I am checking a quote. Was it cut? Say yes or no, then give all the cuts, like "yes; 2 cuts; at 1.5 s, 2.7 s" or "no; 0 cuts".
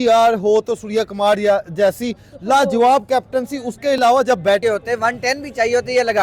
yes; 1 cut; at 4.6 s